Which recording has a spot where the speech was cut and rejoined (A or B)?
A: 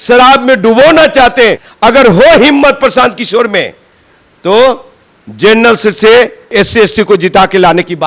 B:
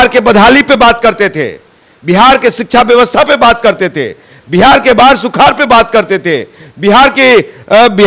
A